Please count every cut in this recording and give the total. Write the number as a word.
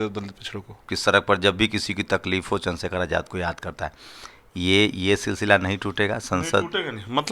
one